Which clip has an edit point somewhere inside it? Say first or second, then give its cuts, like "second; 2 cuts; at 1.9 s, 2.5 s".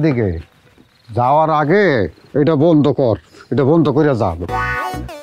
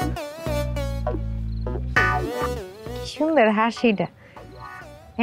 second; 1 cut; at 2.0 s